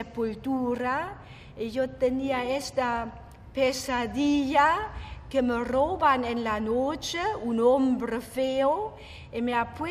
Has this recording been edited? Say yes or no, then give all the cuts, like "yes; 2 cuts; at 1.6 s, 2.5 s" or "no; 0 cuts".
yes; 1 cut; at 3.7 s